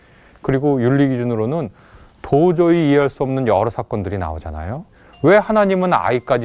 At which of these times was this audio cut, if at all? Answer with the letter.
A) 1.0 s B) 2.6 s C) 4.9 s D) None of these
C